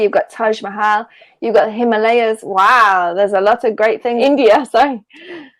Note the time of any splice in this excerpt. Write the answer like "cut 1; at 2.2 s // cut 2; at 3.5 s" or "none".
cut 1; at 4.2 s

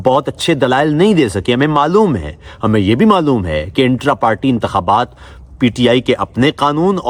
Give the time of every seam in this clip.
none

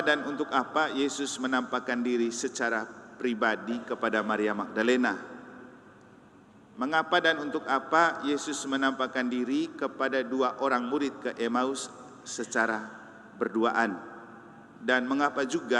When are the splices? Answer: none

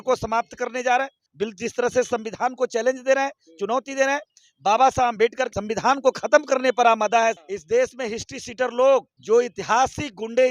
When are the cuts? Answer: cut 1; at 1.2 s // cut 2; at 5.5 s // cut 3; at 7.4 s // cut 4; at 9.1 s

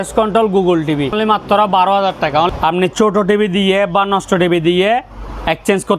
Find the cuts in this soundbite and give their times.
cut 1; at 1.1 s // cut 2; at 2.5 s

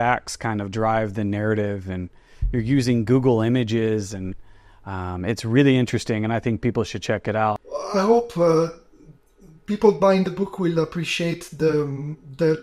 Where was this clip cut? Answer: cut 1; at 7.6 s

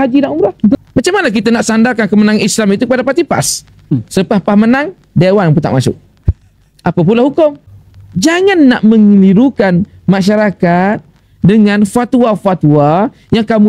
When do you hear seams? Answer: cut 1; at 0.8 s // cut 2; at 4.0 s // cut 3; at 7.6 s

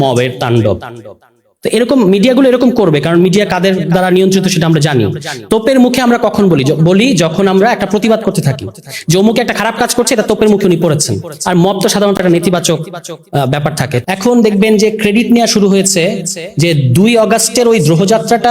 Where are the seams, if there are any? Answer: cut 1; at 13.9 s

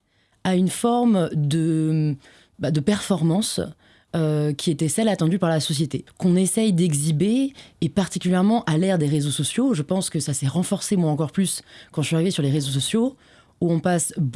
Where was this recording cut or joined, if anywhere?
cut 1; at 6.0 s

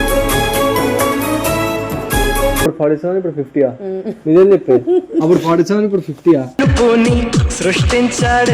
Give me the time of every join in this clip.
cut 1; at 2.7 s

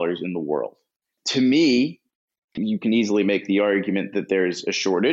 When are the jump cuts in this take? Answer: cut 1; at 1.1 s // cut 2; at 2.5 s

